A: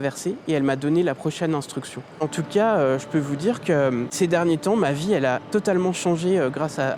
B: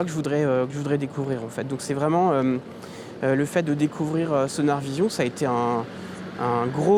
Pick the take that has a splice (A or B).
A